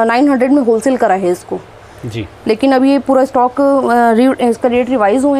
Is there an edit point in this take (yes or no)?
no